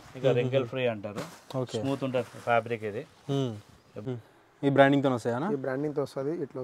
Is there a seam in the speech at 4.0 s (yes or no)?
yes